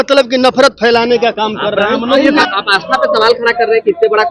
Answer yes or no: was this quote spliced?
yes